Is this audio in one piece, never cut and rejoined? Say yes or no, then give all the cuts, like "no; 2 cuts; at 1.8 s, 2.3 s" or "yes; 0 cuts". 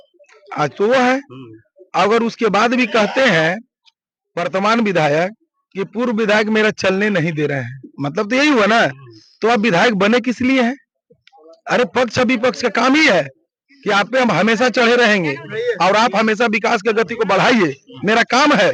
yes; 0 cuts